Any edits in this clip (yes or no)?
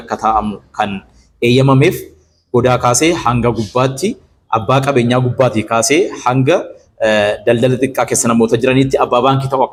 no